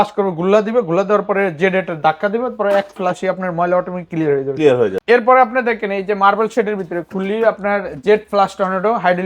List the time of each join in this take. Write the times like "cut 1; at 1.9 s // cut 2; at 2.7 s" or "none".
cut 1; at 5.0 s